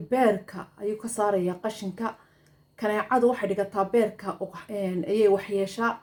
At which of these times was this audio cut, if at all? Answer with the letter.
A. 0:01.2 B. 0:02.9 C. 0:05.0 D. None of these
D